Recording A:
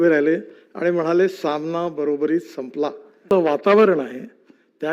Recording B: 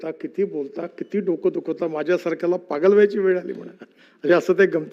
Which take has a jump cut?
A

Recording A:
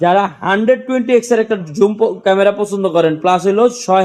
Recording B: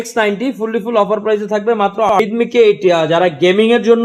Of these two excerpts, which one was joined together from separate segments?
B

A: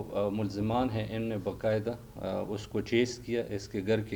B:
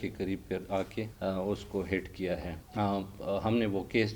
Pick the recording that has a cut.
B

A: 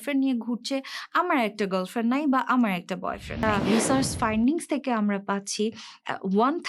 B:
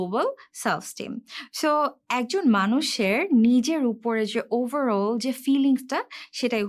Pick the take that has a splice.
A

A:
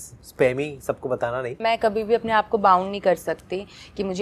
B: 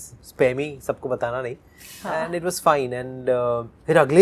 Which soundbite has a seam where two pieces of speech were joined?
A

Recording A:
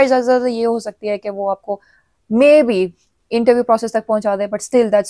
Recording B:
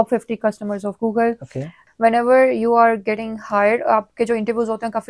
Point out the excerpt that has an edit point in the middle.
B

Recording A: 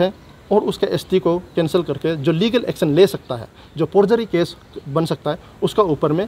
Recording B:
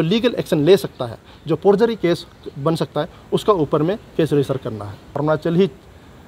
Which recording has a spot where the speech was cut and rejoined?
B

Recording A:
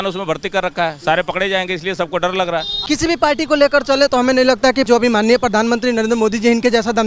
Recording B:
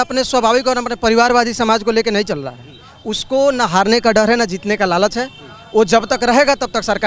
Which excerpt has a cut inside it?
A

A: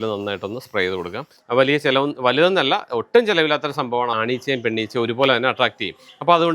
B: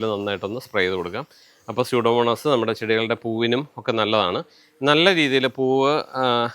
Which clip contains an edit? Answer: A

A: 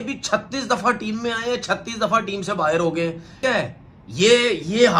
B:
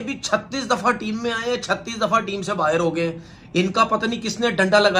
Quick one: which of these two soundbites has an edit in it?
A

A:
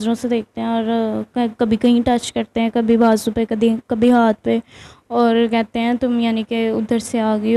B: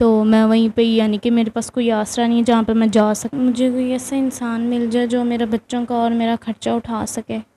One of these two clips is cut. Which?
B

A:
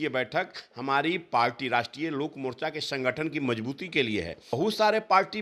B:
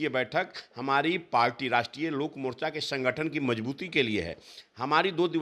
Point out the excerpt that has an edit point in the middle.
A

